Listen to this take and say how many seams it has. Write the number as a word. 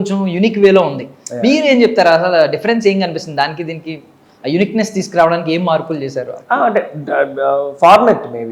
zero